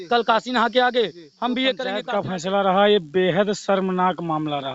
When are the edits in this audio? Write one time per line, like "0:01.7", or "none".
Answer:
0:02.0